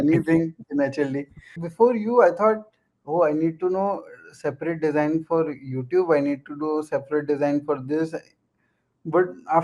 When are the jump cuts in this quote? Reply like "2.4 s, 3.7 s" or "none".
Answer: 1.6 s